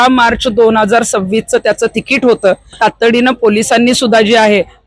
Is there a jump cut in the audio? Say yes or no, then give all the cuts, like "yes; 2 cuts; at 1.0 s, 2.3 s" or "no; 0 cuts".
yes; 1 cut; at 2.8 s